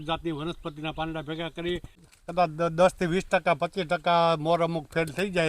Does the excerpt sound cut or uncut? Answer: cut